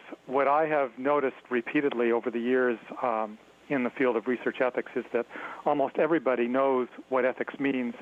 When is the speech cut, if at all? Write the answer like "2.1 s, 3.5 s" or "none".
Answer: none